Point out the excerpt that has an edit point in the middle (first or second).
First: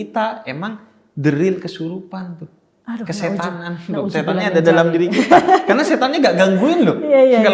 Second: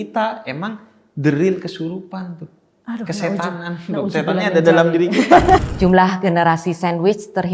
second